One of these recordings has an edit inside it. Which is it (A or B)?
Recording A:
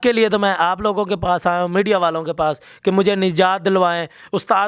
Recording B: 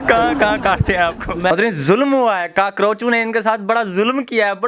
B